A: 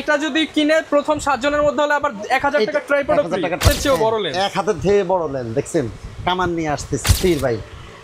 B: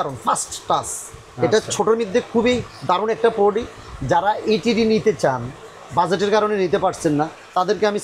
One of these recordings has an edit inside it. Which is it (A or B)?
A